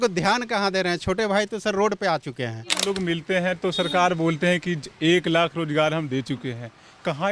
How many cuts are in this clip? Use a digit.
1